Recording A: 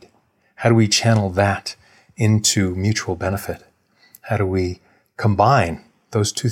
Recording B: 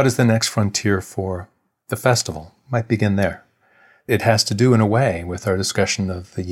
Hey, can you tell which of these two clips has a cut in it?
B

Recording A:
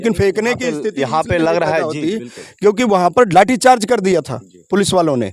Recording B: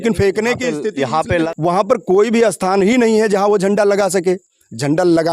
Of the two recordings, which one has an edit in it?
B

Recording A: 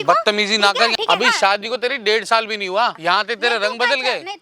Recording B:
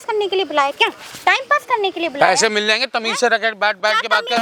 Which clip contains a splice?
A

